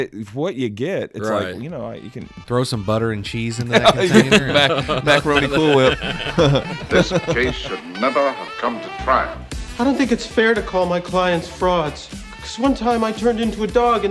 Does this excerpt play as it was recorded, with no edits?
no; 2 cuts; at 2.4 s, 7.4 s

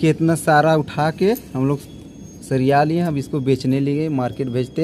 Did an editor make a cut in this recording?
no; 0 cuts

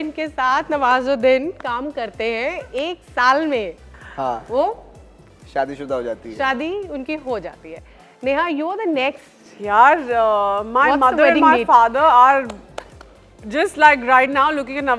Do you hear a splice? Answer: no; 0 cuts

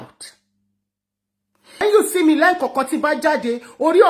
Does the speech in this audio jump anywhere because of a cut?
yes; 1 cut; at 1.8 s

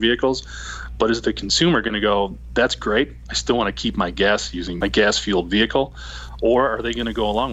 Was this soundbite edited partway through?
yes; 1 cut; at 4.7 s

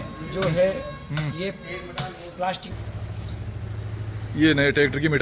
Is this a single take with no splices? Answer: no; 1 cut; at 2.7 s

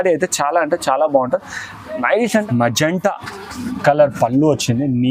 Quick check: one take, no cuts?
no; 1 cut; at 2.4 s

